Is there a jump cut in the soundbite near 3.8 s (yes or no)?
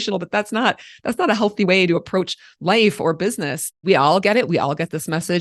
yes